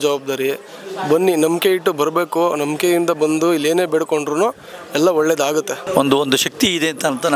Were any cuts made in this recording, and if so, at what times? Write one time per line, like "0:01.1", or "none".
0:05.8